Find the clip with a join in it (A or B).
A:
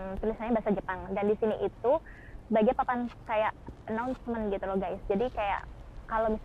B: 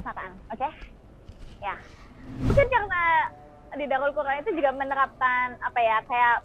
B